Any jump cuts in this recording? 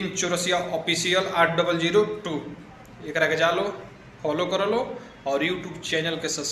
no; 0 cuts

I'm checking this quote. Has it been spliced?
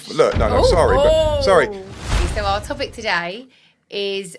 yes; 1 cut; at 2.1 s

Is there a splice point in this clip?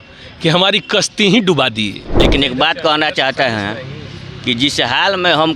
yes; 1 cut; at 2.3 s

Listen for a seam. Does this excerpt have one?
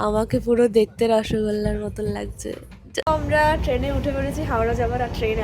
yes; 1 cut; at 3.0 s

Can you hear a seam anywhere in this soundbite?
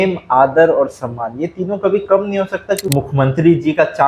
yes; 1 cut; at 2.8 s

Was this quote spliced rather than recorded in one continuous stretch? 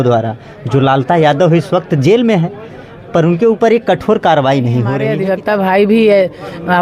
yes; 1 cut; at 5.0 s

